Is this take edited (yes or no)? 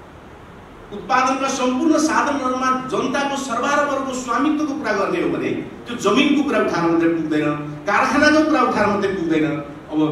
no